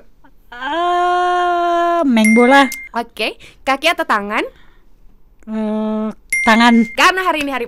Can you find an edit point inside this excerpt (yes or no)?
no